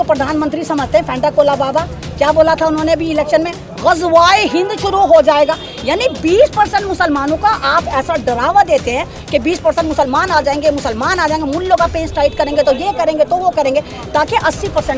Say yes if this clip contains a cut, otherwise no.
no